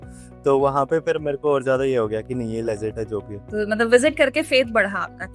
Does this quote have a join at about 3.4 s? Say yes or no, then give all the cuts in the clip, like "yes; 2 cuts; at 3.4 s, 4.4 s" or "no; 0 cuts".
yes; 1 cut; at 3.4 s